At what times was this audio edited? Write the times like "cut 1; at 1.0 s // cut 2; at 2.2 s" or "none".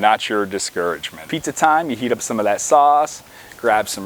cut 1; at 1.3 s